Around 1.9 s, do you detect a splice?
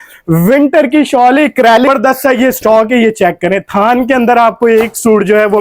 yes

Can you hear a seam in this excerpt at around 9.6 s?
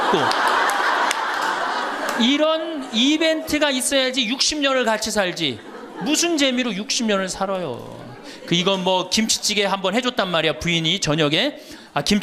no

